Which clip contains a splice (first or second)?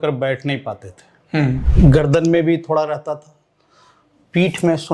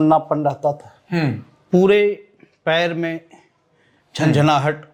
first